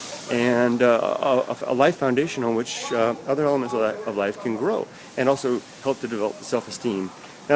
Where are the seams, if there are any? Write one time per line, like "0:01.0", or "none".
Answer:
none